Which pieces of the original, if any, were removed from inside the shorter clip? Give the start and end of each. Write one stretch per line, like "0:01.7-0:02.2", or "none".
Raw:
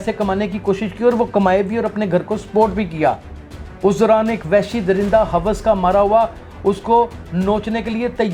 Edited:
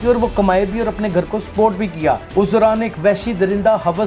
0:03.2-0:03.7